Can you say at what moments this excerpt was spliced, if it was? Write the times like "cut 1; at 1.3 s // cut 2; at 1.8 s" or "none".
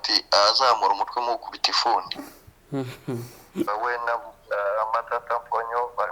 cut 1; at 3.7 s